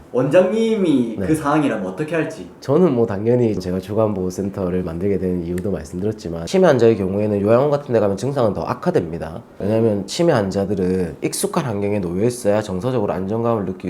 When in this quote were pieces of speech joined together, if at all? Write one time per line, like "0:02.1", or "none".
0:03.6
0:06.4
0:09.5